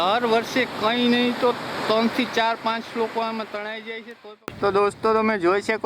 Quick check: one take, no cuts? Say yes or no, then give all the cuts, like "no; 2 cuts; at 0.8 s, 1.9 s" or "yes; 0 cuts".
no; 1 cut; at 4.2 s